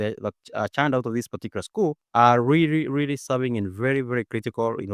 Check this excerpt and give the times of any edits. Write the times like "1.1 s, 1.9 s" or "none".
2.0 s